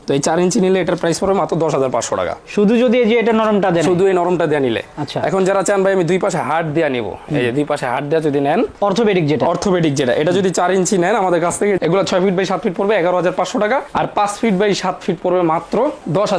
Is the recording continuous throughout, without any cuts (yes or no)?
yes